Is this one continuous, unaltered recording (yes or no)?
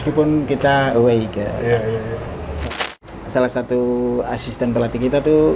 no